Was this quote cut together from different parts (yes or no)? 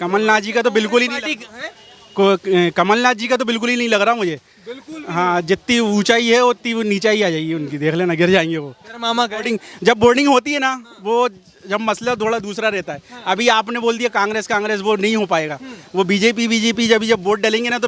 no